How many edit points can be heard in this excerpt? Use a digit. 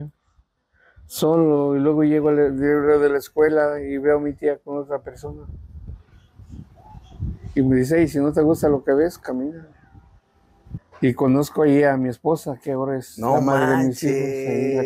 1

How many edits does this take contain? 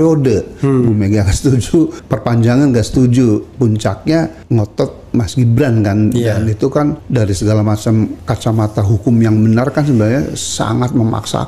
4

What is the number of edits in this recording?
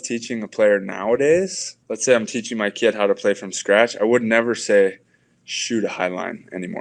0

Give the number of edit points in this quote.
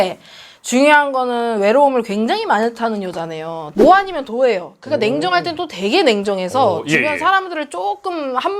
1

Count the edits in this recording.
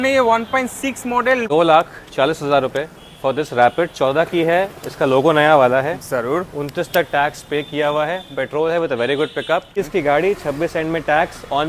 2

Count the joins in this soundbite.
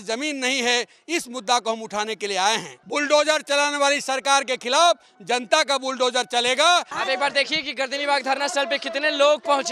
2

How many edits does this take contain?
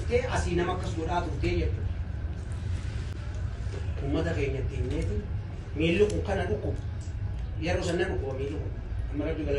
0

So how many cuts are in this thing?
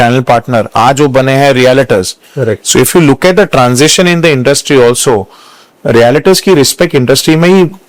0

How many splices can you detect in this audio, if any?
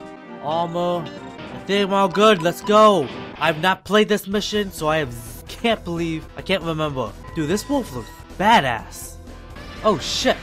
1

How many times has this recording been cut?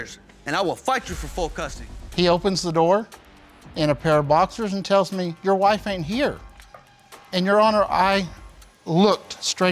1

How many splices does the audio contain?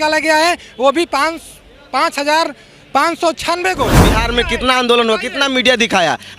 1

